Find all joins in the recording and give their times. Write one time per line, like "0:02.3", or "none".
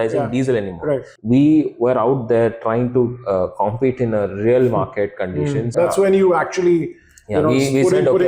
0:01.1
0:05.7